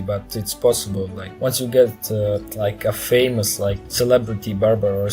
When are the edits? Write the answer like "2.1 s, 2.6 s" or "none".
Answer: 1.2 s, 2.5 s, 3.8 s

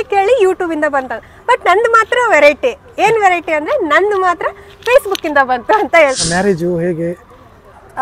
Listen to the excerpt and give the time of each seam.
6.2 s

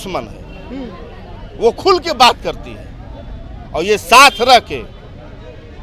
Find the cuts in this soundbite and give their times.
none

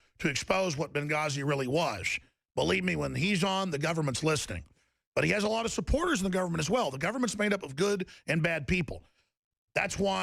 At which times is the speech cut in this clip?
8.6 s

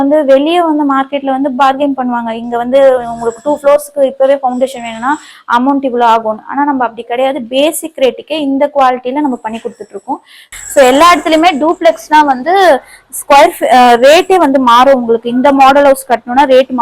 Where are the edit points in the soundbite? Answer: 10.5 s

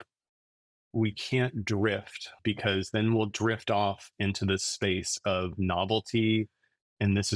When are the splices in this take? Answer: 2.3 s

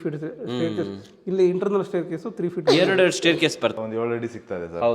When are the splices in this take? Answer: 3.8 s

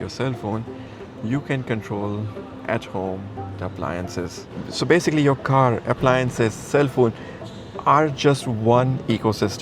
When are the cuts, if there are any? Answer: none

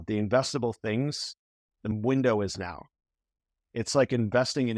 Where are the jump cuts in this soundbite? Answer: 1.9 s

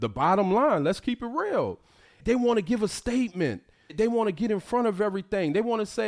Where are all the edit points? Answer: 2.2 s, 3.9 s

